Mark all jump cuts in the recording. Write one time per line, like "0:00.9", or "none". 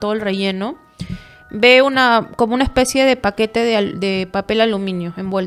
none